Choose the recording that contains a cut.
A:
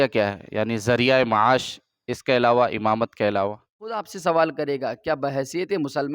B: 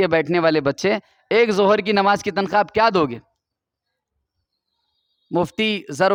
A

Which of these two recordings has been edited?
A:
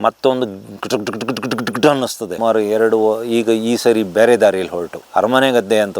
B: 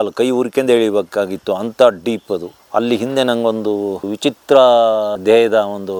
A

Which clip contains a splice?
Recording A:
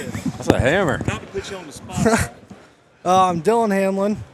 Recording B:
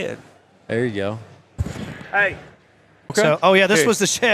B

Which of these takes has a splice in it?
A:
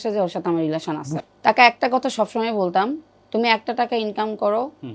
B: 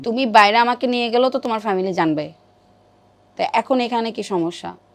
A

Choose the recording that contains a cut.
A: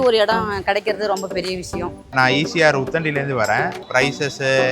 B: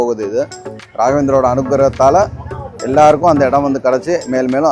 A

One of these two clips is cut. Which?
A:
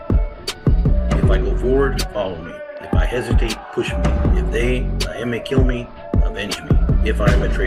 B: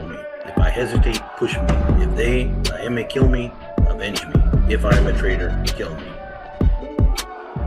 B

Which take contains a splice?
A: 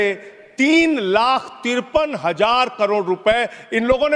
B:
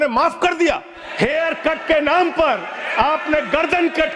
B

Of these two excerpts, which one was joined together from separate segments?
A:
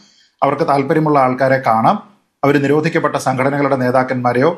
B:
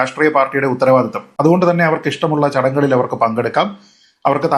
B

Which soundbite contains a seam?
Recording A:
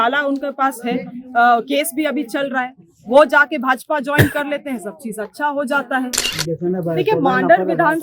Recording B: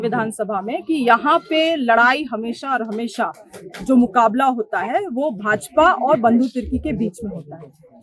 A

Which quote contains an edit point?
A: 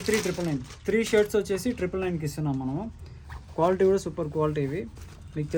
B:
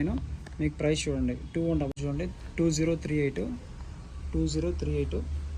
B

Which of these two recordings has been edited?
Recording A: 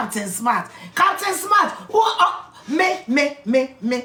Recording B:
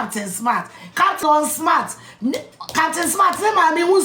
B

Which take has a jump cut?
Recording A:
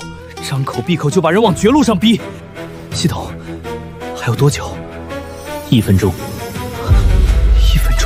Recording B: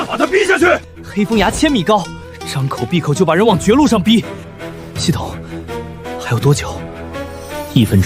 B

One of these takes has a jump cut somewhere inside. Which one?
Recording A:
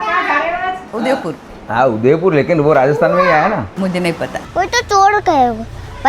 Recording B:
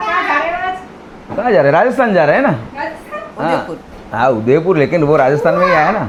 A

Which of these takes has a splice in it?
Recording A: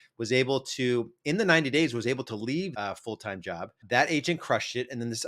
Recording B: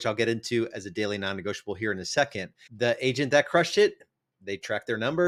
A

